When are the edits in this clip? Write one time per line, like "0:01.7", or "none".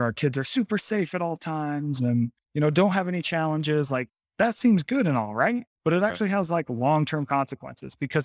0:02.4
0:04.2
0:05.7